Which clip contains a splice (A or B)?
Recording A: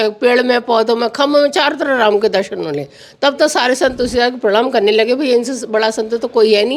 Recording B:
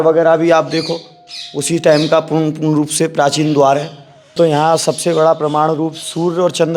B